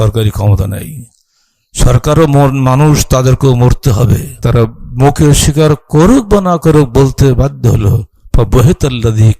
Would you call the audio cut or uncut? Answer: cut